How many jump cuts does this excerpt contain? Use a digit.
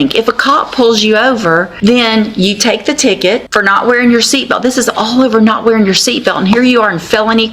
2